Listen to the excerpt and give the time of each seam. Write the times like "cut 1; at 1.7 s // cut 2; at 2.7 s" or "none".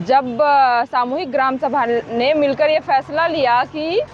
none